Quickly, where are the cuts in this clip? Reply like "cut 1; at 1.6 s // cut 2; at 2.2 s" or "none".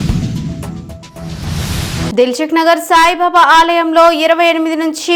none